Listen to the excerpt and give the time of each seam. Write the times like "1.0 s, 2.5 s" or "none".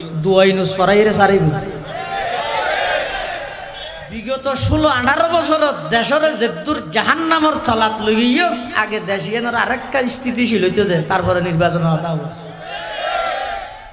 4.1 s